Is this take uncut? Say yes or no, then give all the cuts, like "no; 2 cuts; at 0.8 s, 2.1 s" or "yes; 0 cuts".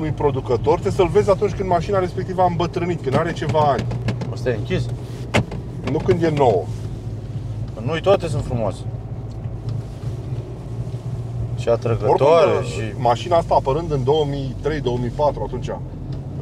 yes; 0 cuts